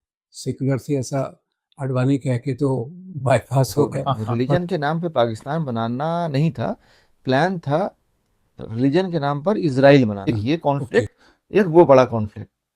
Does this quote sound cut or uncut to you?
cut